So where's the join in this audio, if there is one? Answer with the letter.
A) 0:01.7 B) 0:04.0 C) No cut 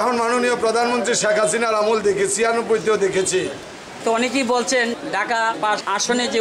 B